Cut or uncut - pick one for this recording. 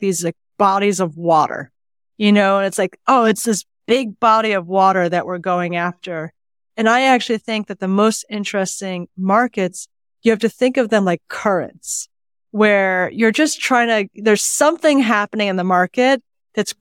uncut